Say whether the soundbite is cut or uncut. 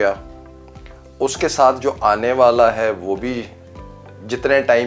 uncut